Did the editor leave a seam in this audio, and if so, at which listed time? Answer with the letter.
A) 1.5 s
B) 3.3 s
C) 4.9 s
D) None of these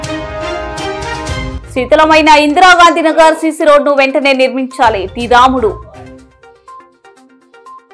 A